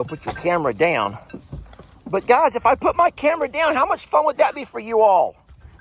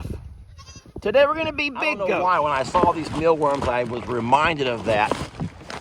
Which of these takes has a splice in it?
second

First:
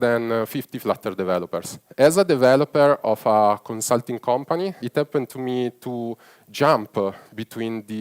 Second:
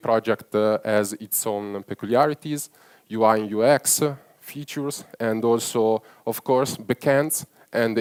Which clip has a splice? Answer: first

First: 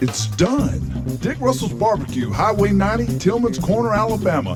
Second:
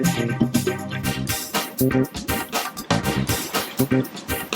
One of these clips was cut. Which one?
second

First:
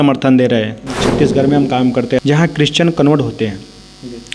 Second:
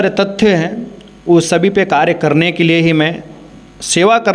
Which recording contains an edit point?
first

